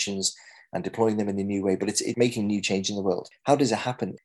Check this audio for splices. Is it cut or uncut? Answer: uncut